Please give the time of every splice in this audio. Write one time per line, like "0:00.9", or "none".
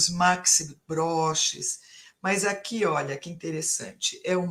none